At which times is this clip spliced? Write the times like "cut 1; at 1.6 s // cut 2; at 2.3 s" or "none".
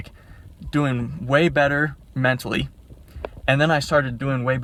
none